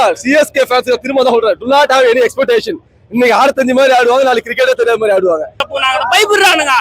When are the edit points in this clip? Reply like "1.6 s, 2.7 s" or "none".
5.7 s